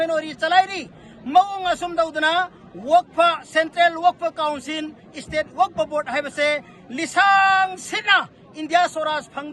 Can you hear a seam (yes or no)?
no